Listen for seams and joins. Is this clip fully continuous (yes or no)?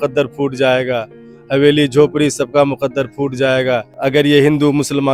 yes